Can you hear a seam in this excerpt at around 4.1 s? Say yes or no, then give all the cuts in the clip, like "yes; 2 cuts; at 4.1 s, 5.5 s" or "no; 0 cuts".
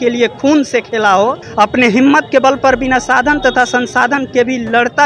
no; 1 cut; at 1.4 s